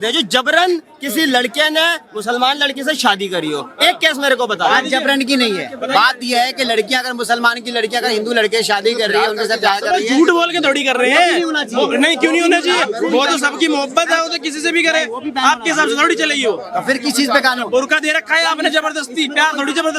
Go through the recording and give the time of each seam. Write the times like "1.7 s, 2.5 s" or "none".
none

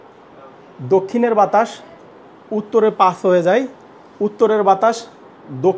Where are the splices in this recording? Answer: none

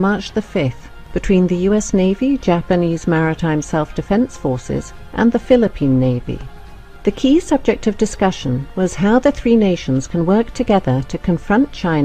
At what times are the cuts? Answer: 1.6 s

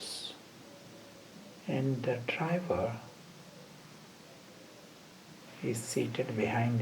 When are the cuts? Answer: 1.3 s, 5.1 s

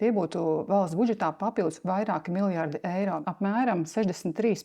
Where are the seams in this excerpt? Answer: 3.2 s

